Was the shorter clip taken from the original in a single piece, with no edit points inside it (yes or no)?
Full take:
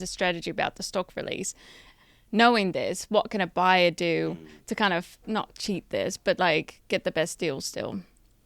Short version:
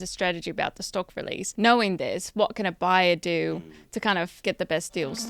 no